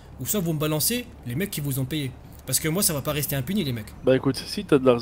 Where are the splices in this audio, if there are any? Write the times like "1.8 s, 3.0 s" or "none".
3.9 s